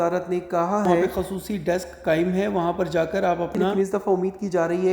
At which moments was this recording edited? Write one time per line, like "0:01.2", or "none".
0:01.0
0:03.7